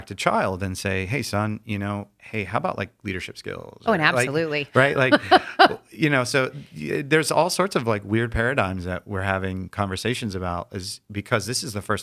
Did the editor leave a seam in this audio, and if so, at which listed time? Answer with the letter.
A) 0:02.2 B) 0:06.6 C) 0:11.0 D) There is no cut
A